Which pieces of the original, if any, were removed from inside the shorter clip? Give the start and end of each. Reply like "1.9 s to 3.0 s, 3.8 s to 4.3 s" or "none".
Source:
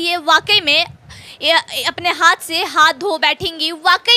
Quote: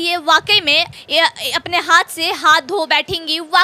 1.0 s to 1.3 s